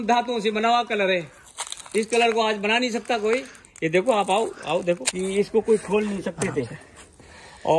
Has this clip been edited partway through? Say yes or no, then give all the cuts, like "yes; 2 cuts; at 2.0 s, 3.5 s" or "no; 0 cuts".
yes; 1 cut; at 5.1 s